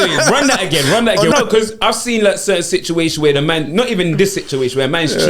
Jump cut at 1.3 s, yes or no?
yes